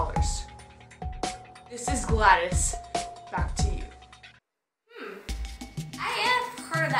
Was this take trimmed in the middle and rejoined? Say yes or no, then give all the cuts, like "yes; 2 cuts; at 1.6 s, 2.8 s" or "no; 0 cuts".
no; 0 cuts